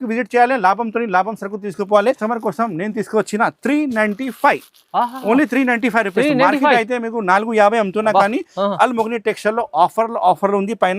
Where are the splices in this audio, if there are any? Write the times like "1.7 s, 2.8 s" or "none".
2.2 s